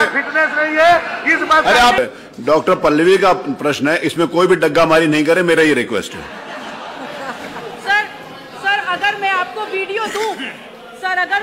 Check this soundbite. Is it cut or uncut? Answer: cut